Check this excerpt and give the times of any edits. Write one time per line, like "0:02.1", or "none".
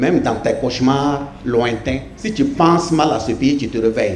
none